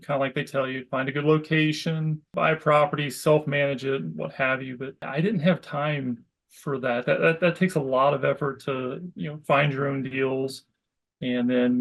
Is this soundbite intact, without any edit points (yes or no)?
no